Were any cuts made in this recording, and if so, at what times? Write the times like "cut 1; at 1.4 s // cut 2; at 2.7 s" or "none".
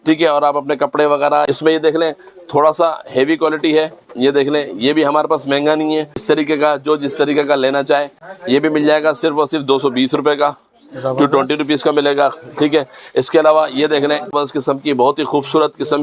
cut 1; at 1.4 s // cut 2; at 6.2 s // cut 3; at 14.3 s